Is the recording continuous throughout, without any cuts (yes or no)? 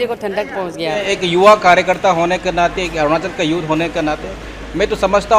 no